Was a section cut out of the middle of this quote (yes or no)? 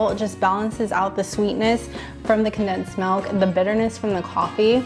no